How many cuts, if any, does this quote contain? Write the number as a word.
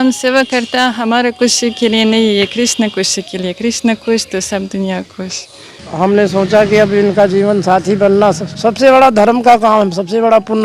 two